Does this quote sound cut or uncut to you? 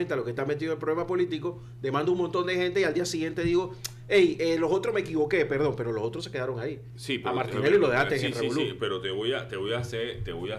uncut